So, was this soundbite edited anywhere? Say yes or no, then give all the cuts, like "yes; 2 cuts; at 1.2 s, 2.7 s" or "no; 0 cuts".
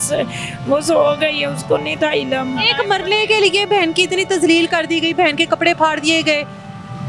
yes; 1 cut; at 2.7 s